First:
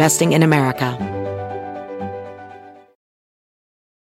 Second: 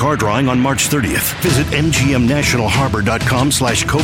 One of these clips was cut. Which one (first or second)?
first